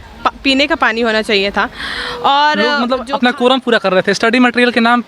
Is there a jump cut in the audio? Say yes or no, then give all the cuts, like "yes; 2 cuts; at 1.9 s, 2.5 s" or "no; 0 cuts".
yes; 1 cut; at 2.8 s